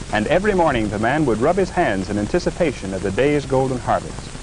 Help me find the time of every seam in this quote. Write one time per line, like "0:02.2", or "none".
0:00.9